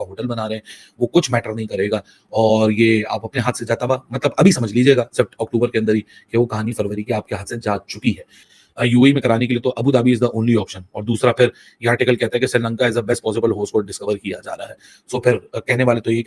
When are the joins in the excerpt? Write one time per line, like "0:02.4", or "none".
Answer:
none